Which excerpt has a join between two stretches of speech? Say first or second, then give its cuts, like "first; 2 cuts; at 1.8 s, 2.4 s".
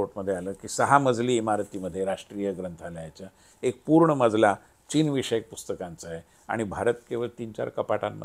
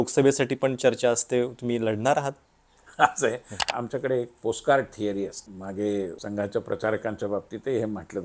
second; 3 cuts; at 3.7 s, 5.5 s, 6.2 s